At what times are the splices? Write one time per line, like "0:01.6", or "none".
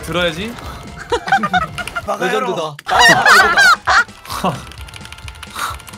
0:04.1